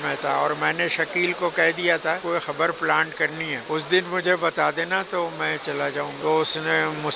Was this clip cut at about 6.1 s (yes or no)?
yes